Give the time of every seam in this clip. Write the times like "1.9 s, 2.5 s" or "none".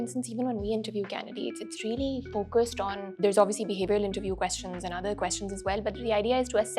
3.0 s